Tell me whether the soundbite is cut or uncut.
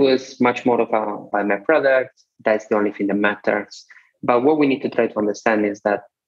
cut